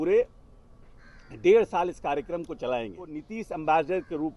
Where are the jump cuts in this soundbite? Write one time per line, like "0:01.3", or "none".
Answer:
0:03.3